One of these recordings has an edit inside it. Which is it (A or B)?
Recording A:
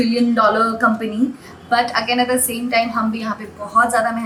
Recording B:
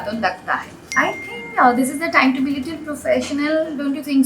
B